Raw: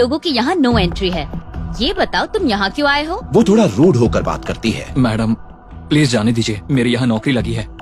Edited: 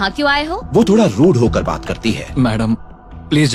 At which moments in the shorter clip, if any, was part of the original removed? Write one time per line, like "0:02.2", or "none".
none